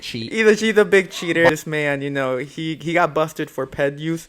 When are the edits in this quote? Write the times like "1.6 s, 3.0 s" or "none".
1.5 s